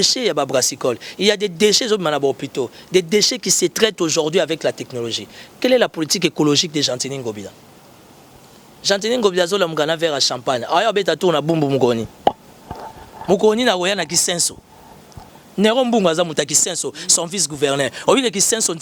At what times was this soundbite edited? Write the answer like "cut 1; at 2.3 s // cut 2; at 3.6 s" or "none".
none